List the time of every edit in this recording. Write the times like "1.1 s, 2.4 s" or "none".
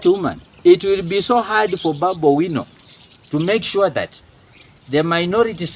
none